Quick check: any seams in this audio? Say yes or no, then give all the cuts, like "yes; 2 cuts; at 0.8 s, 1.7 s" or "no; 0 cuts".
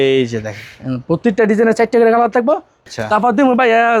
yes; 1 cut; at 2.8 s